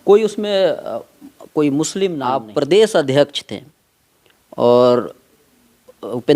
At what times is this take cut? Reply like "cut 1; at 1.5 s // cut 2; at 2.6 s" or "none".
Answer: cut 1; at 2.4 s

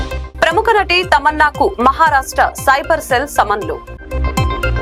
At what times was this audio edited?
none

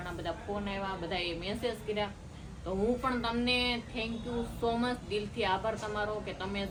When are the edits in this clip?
none

